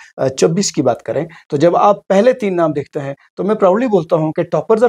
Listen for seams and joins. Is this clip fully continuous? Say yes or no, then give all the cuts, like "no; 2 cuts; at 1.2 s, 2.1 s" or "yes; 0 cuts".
yes; 0 cuts